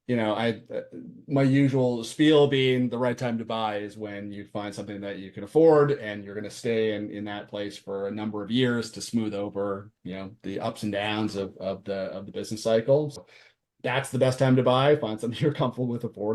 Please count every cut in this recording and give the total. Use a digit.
1